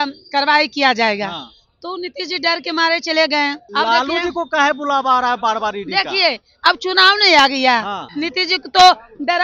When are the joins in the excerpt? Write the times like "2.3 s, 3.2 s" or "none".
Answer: 3.6 s, 8.1 s